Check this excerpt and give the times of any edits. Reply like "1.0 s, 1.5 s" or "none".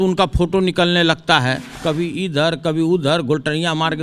1.7 s